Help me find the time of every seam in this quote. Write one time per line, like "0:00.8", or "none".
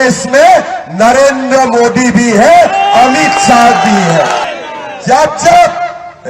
0:04.5